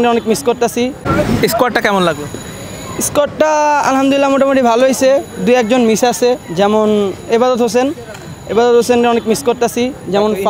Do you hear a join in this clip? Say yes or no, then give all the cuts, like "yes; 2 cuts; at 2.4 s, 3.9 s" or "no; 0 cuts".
yes; 1 cut; at 1.0 s